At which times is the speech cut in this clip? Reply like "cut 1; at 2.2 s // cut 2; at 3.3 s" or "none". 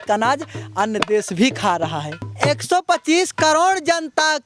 cut 1; at 2.1 s